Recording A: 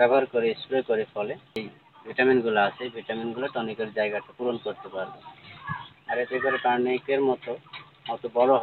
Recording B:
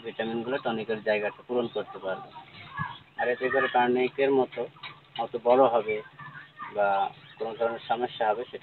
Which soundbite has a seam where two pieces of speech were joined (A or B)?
A